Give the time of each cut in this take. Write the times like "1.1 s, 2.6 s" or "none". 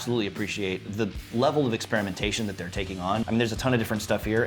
0.9 s, 3.3 s